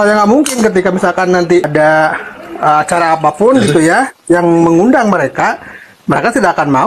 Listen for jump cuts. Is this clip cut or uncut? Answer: cut